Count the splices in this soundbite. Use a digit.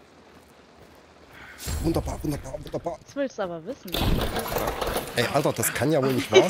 1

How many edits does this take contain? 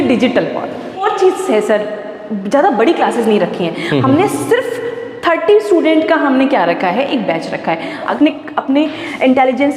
2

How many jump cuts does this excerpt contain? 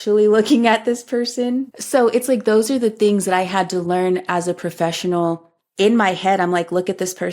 2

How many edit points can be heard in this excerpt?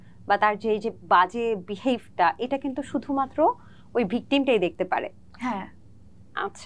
0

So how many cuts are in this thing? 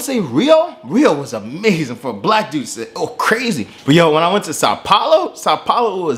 1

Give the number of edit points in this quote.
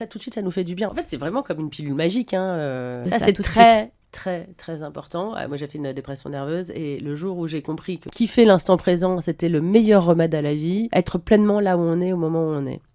4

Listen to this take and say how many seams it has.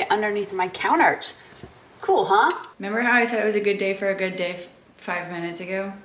1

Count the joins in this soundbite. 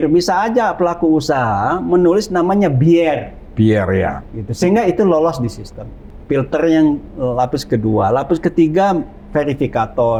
0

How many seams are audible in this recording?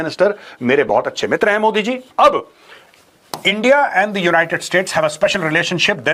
0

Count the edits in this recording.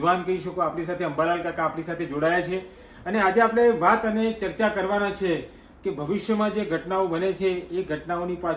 0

